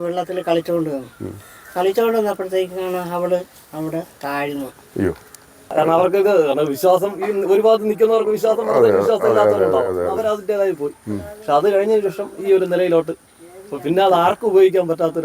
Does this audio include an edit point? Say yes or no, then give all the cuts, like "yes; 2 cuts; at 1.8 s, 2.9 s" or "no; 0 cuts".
yes; 1 cut; at 5.7 s